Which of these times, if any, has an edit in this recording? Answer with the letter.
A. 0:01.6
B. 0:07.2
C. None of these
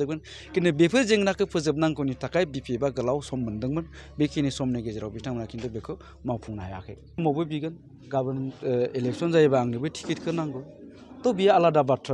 B